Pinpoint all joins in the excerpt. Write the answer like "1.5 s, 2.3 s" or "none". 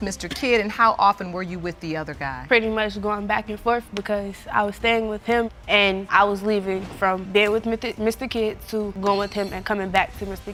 none